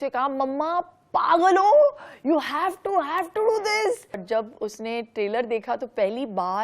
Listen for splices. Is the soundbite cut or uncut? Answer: cut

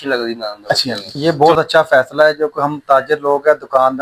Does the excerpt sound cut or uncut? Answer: cut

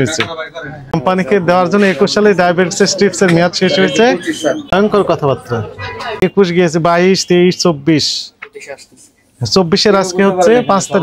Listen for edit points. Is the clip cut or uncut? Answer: cut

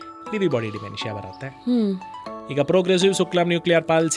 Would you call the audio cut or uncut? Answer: uncut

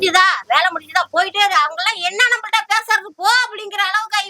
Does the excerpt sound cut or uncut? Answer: uncut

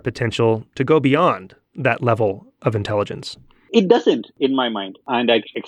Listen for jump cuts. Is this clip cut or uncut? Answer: uncut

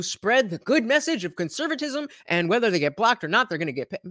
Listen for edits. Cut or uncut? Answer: uncut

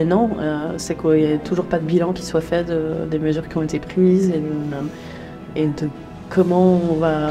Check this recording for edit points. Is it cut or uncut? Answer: uncut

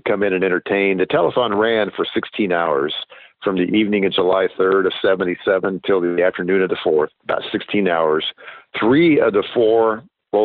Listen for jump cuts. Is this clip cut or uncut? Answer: cut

